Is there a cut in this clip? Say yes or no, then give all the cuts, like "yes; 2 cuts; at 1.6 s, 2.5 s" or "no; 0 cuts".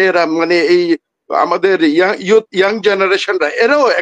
no; 0 cuts